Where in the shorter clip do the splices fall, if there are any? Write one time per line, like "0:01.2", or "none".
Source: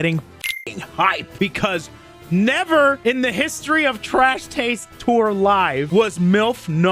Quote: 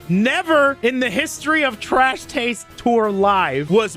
none